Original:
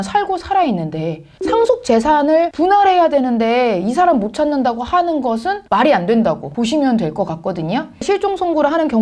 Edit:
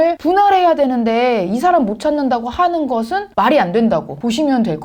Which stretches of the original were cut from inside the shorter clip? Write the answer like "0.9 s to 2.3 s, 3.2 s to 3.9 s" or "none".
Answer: none